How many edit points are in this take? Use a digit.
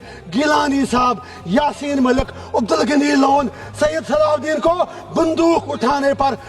0